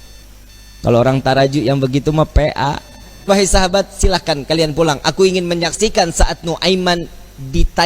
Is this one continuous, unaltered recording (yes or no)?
no